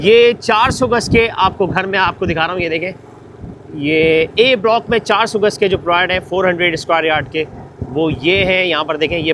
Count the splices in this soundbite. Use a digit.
0